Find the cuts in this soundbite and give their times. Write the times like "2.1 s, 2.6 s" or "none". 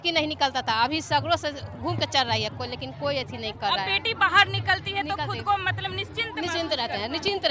none